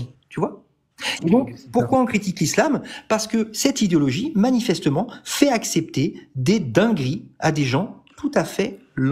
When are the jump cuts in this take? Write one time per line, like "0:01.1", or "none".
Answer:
none